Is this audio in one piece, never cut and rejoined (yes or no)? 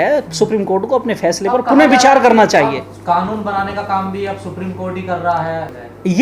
yes